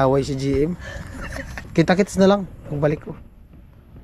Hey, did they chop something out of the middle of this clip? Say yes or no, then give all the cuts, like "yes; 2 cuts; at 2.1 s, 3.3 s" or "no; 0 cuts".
yes; 1 cut; at 1.6 s